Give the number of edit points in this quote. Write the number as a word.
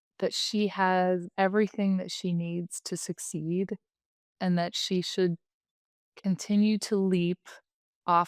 one